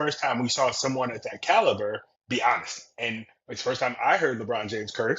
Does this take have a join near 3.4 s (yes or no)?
no